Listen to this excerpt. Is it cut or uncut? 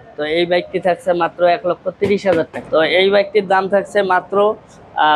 cut